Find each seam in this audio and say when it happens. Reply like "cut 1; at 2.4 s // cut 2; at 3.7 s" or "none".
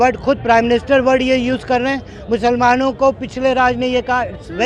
none

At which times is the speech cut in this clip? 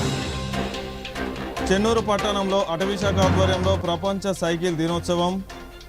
none

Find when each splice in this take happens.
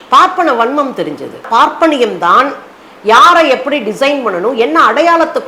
cut 1; at 1.5 s

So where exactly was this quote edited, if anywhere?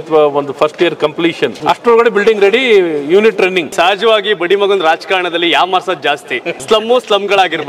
cut 1; at 1.6 s // cut 2; at 3.7 s // cut 3; at 6.5 s

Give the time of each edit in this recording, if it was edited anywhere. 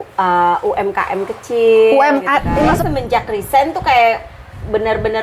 cut 1; at 2.7 s

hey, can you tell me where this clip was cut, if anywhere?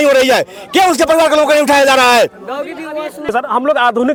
none

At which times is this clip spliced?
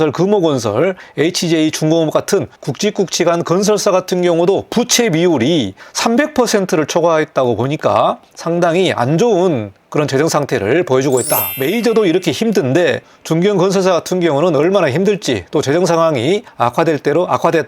cut 1; at 1.0 s // cut 2; at 2.6 s // cut 3; at 5.8 s // cut 4; at 8.3 s // cut 5; at 11.5 s // cut 6; at 16.5 s

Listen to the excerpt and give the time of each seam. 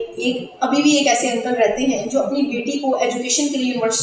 none

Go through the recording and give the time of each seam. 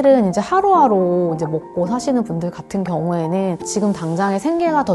cut 1; at 3.7 s

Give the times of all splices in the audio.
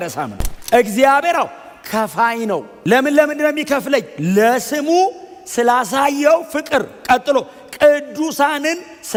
none

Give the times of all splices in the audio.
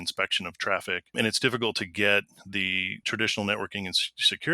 cut 1; at 1.1 s // cut 2; at 3.0 s

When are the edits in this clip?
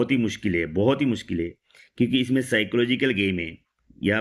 none

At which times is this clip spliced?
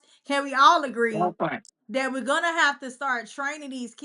none

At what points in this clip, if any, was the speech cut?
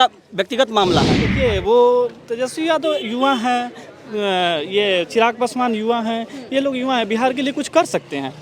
cut 1; at 1.2 s

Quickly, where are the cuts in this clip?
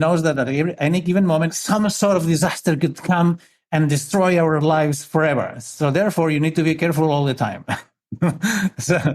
cut 1; at 1.6 s

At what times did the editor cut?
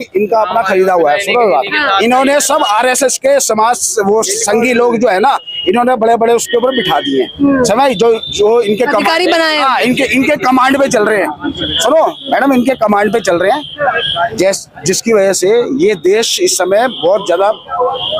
none

